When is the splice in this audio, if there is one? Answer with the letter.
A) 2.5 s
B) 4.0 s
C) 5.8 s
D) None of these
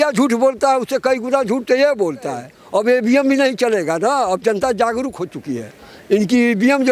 A